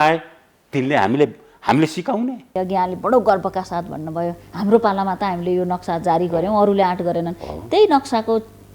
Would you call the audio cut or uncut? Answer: cut